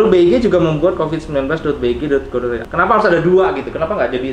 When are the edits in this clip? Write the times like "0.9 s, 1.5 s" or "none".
2.6 s